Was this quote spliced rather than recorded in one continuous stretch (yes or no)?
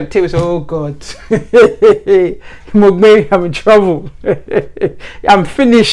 no